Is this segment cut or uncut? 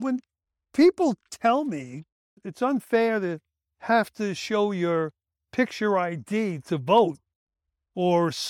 cut